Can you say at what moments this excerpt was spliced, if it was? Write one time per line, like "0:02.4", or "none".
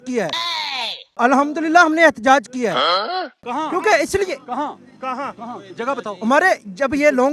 none